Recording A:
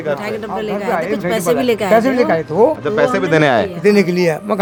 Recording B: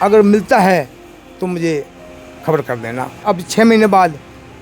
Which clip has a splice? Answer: B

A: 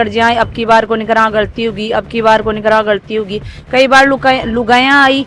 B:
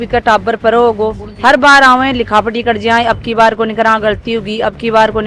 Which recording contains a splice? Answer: B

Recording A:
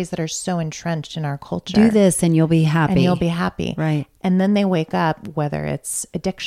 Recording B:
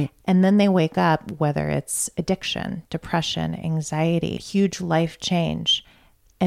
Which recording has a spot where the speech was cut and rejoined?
B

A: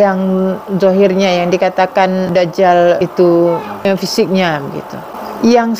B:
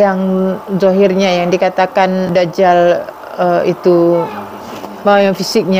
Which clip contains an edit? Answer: A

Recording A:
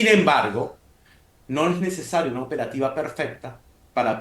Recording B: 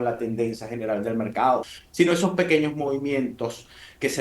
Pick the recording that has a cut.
B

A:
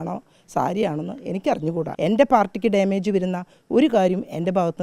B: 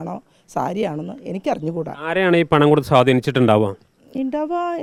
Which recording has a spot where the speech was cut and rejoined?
A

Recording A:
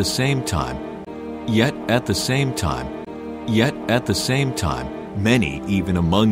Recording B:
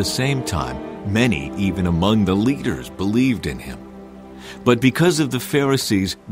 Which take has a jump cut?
B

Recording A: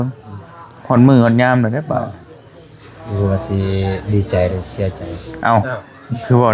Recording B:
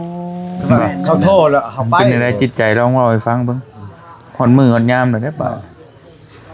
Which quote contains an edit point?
B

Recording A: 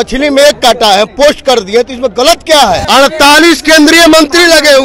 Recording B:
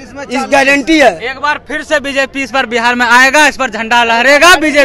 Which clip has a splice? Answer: A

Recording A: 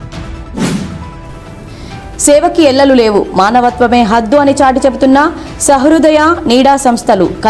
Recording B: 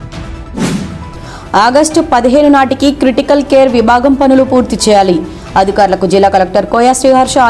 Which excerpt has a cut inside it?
B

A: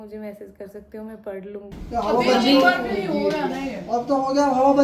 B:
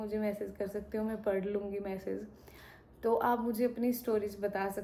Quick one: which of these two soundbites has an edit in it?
A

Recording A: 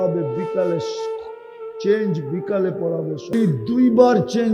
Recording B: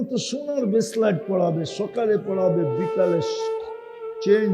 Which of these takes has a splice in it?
A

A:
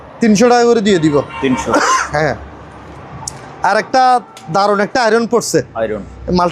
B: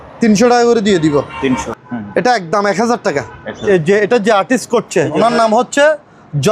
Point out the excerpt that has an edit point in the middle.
B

